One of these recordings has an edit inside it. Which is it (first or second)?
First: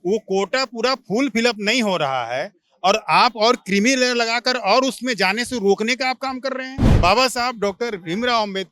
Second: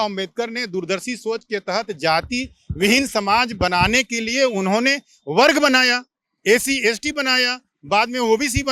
first